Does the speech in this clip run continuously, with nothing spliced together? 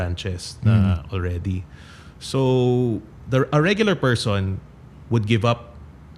yes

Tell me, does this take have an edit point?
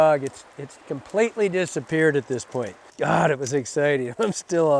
yes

